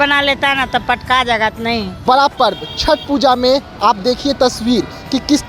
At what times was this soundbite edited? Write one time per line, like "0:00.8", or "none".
0:02.0